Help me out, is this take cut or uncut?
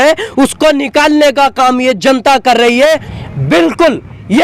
cut